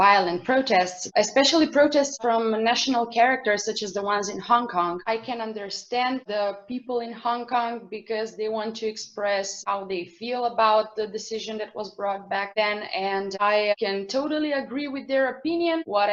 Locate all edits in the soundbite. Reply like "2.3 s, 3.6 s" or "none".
none